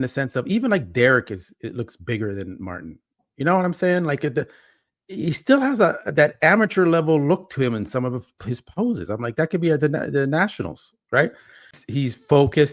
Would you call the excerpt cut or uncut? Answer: cut